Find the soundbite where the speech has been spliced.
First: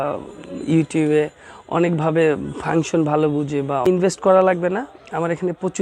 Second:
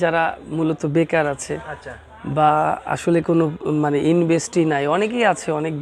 first; 1 cut; at 3.9 s

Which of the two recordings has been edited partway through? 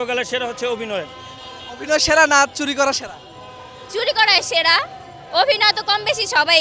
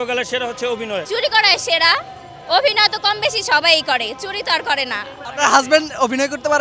second; 2 cuts; at 1.0 s, 5.2 s

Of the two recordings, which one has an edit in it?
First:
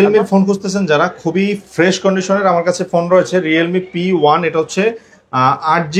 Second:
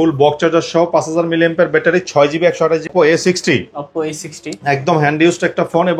second; 1 cut; at 2.9 s

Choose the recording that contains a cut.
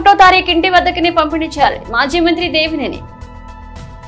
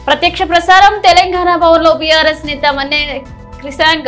first; 1 cut; at 3.1 s

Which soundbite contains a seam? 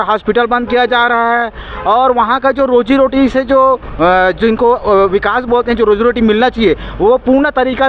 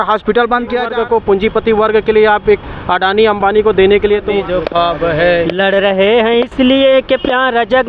second; 2 cuts; at 0.9 s, 4.3 s

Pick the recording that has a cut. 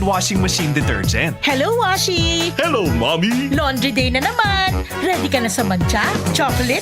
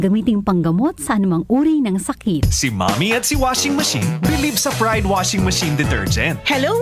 second; 1 cut; at 2.4 s

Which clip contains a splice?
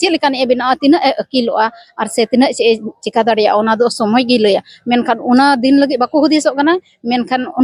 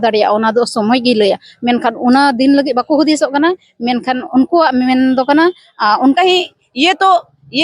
second; 1 cut; at 6.2 s

